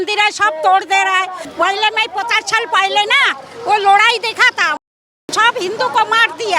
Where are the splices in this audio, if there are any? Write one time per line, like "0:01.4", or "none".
0:01.4